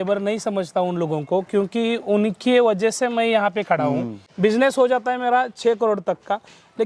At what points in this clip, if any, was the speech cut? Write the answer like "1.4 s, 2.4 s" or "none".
4.2 s

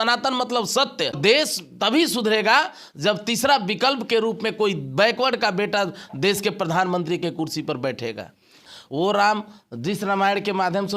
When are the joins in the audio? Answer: 1.2 s, 8.6 s

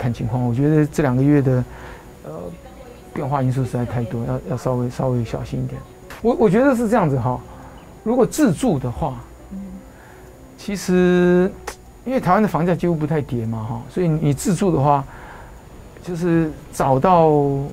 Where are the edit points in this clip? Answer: 6.1 s

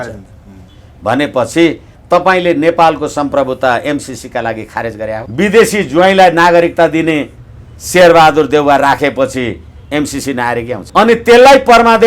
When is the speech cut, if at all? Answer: 5.2 s, 10.8 s

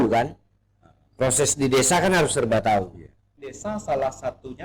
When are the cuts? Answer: 3.6 s

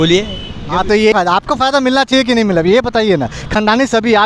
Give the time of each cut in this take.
1.1 s

